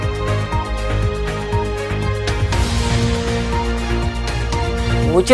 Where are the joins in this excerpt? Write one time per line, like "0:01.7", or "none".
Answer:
0:02.4